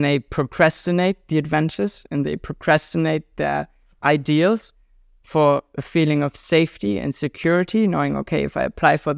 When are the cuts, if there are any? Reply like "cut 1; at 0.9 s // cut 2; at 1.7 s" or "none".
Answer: none